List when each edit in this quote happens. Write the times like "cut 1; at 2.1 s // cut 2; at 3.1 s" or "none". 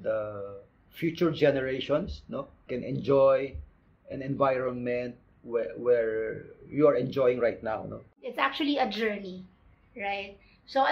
cut 1; at 8.3 s